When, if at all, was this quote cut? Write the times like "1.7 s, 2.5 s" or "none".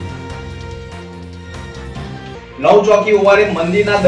1.3 s